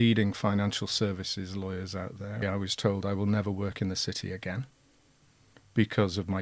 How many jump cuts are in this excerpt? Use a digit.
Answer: 1